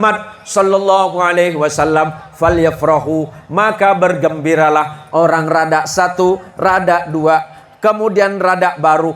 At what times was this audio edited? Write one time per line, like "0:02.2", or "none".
none